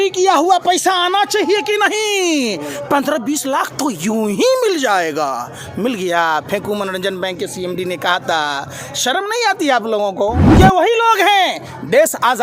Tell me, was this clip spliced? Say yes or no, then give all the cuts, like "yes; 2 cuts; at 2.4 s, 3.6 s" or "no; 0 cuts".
yes; 1 cut; at 10.5 s